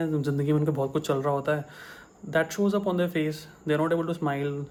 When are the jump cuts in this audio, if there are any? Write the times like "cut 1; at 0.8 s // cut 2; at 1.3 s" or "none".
none

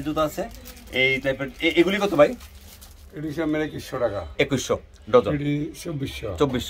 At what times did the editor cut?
none

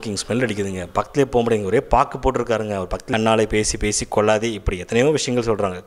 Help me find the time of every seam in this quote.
cut 1; at 3.0 s

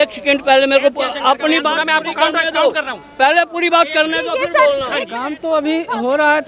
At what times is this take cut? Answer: cut 1; at 5.1 s

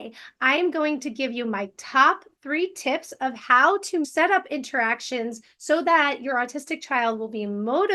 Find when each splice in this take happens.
none

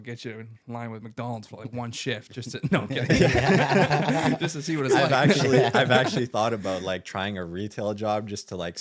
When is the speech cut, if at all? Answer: none

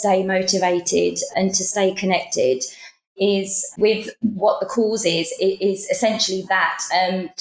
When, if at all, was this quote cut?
cut 1; at 1.3 s

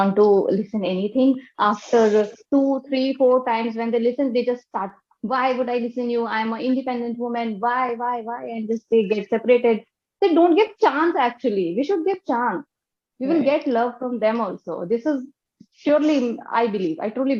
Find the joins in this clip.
none

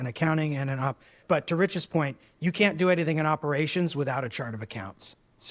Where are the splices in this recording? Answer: cut 1; at 1.2 s

